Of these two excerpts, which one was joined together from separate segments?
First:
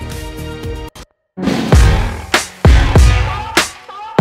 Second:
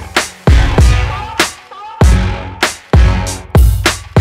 first; 1 cut; at 0.9 s

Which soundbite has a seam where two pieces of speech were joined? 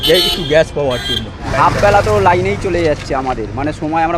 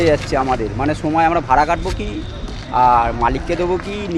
first; 1 cut; at 1.5 s

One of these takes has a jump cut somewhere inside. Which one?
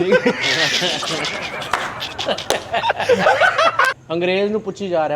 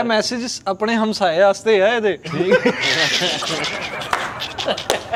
first; 1 cut; at 3.9 s

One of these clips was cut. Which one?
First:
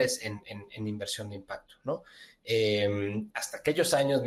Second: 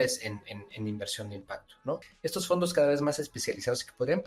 second; 1 cut; at 2.1 s

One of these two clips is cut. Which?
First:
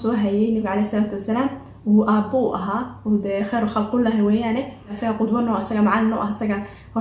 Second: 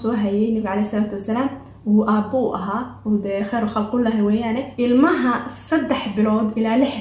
second; 1 cut; at 4.7 s

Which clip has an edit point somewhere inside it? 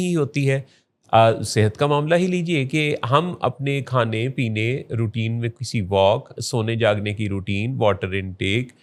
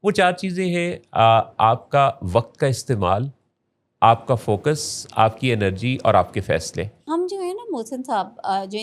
second; 1 cut; at 7.0 s

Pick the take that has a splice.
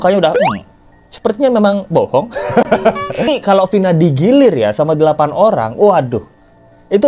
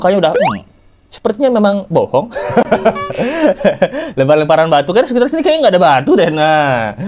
first; 1 cut; at 3.3 s

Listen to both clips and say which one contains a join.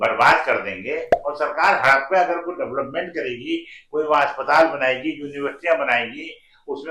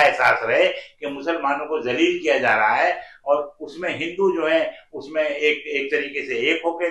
first; 1 cut; at 1.1 s

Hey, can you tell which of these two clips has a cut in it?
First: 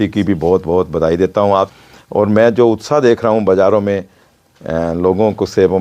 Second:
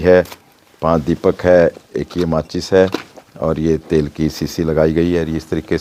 first; 1 cut; at 1.7 s

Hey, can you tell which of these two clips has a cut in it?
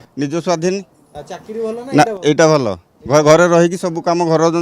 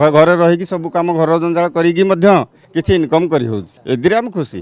second; 2 cuts; at 2.6 s, 3.7 s

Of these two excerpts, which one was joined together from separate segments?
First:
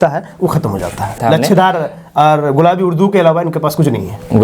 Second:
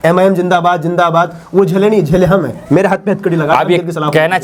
first; 1 cut; at 1.2 s

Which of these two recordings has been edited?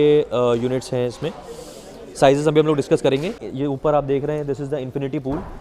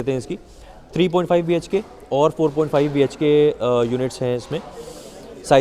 first; 1 cut; at 3.4 s

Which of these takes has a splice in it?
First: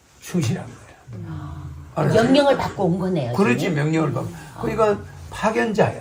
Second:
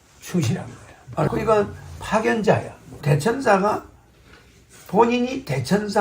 second; 2 cuts; at 1.1 s, 3.0 s

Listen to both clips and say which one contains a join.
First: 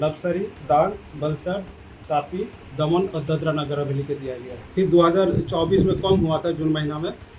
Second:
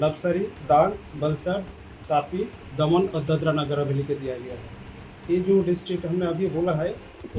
first; 1 cut; at 4.5 s

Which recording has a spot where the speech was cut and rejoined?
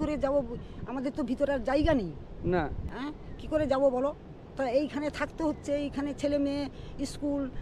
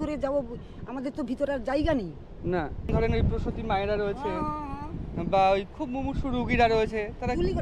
second; 1 cut; at 2.9 s

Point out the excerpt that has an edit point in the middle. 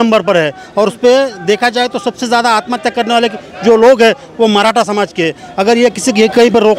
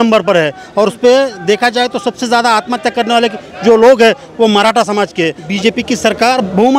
second; 1 cut; at 5.4 s

